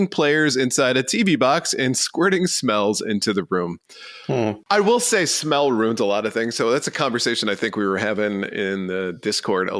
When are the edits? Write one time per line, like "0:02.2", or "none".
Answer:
0:04.6